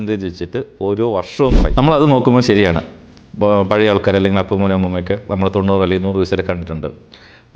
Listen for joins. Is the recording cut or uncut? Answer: cut